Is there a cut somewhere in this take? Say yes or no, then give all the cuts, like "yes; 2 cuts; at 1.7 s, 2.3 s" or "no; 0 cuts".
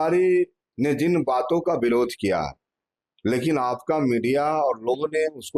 no; 0 cuts